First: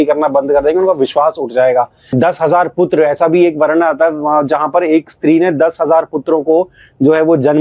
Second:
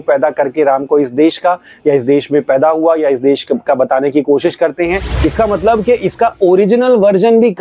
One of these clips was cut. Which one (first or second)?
second